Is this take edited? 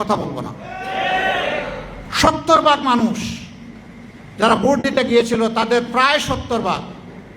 yes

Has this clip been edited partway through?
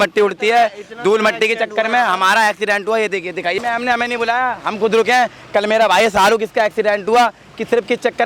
yes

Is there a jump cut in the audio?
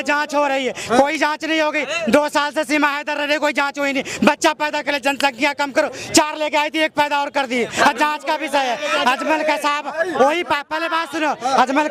no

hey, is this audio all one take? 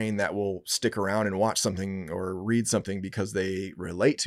yes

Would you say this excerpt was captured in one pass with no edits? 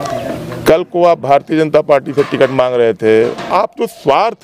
no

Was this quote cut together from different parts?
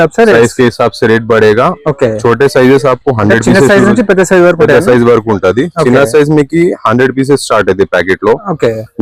no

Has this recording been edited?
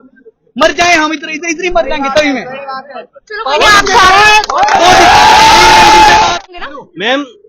yes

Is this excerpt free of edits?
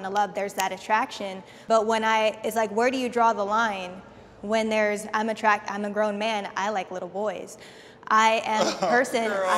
yes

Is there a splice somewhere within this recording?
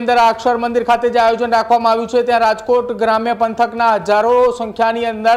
no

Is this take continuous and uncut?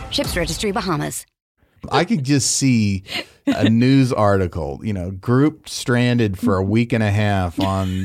no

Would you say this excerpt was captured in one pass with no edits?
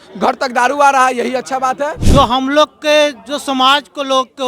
no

